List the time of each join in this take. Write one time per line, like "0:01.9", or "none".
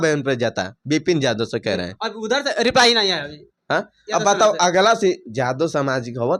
none